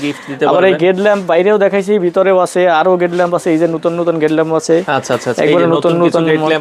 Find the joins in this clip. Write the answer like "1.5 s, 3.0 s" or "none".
none